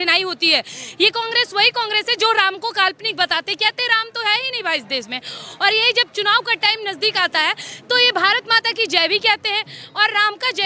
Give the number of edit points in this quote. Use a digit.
0